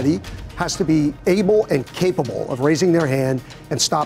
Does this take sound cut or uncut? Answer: uncut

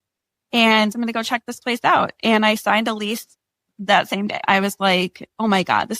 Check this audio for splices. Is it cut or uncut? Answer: cut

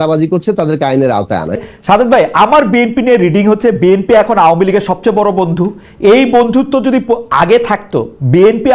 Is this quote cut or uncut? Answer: cut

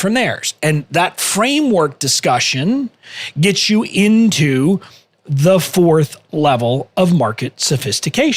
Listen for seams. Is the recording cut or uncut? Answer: uncut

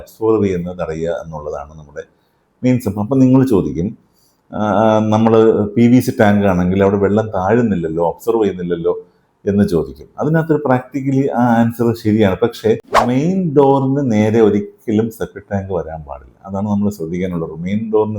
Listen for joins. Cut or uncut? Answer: cut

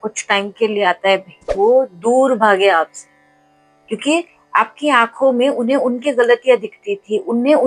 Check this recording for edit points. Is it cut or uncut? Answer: cut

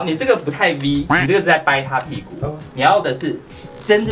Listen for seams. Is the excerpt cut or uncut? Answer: uncut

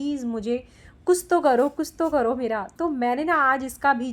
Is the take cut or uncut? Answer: uncut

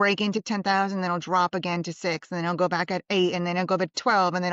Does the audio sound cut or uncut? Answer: uncut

